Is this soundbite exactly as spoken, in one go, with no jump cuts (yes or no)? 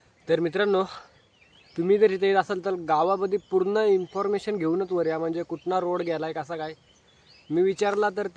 yes